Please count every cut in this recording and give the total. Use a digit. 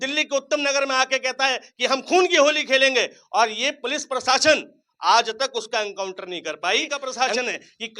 1